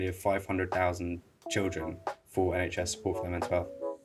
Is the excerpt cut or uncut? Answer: uncut